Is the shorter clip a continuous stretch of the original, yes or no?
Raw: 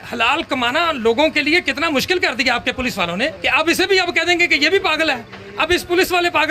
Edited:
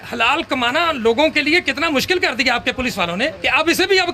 yes